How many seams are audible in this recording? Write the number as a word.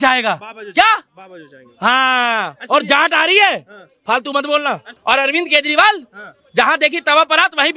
one